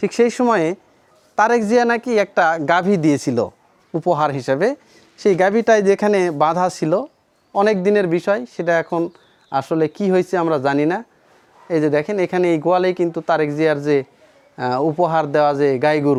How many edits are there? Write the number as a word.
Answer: zero